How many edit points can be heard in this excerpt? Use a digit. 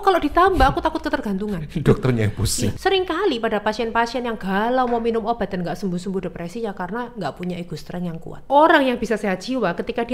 2